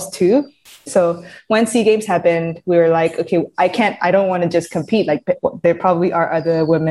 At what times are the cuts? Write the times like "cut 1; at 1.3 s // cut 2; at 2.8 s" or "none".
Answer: none